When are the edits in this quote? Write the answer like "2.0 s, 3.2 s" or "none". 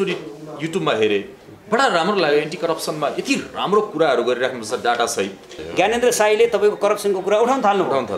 5.6 s